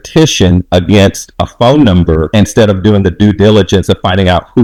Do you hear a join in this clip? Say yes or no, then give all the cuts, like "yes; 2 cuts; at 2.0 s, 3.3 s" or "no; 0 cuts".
no; 0 cuts